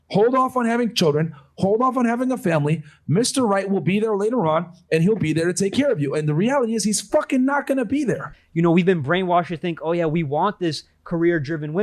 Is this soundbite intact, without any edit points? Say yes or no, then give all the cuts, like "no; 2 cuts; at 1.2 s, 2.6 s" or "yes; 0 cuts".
no; 1 cut; at 8.4 s